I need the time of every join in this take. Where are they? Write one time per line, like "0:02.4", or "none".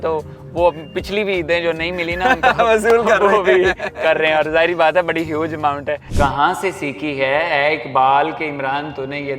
0:06.1